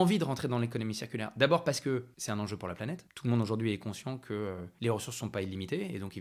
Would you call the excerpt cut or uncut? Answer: cut